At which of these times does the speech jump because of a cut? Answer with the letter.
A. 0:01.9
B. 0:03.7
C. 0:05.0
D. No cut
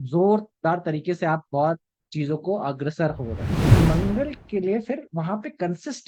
B